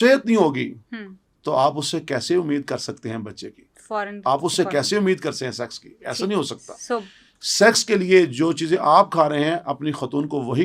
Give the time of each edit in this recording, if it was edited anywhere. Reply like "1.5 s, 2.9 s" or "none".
none